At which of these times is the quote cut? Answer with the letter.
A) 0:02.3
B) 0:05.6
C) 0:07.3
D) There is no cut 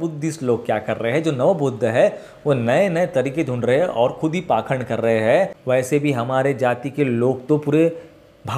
B